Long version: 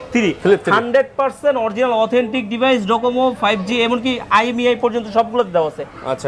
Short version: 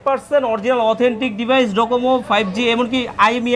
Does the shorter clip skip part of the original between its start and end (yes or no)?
no